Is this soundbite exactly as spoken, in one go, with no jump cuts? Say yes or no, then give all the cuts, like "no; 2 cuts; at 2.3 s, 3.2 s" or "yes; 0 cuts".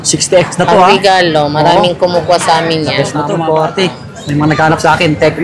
no; 1 cut; at 3.3 s